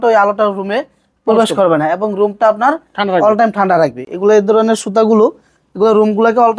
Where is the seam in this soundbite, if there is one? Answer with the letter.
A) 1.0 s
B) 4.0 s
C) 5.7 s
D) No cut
D